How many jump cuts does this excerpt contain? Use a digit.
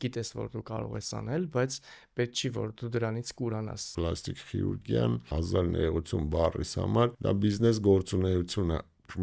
3